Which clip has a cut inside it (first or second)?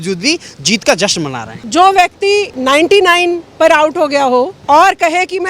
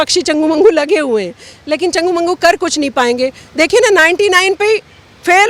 first